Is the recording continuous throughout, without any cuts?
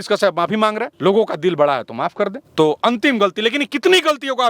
no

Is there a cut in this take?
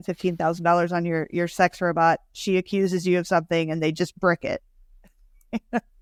no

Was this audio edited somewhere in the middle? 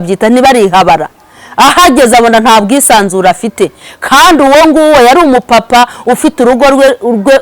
no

